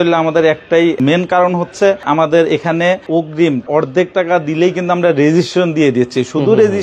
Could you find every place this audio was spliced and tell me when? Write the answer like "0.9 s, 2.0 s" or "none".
1.0 s, 2.0 s, 3.6 s